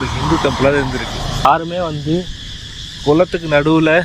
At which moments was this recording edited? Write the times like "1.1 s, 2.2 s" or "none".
1.4 s